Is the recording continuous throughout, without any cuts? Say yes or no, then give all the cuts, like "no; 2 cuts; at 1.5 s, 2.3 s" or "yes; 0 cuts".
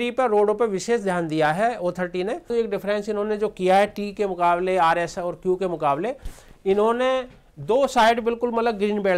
no; 1 cut; at 2.5 s